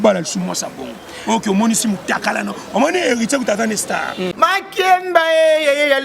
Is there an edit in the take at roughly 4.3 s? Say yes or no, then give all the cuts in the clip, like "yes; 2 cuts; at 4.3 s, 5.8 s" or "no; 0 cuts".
yes; 1 cut; at 4.3 s